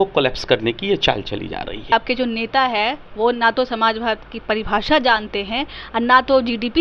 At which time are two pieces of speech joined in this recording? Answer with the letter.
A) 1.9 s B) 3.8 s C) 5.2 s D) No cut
A